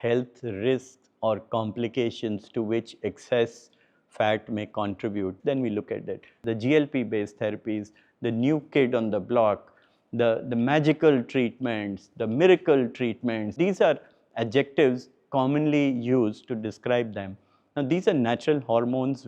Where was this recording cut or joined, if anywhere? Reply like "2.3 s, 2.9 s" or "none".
5.4 s, 6.4 s, 13.6 s

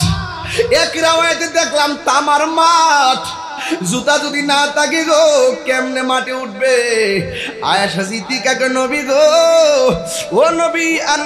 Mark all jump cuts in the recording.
none

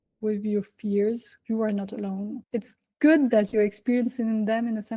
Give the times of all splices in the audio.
1.3 s, 2.4 s

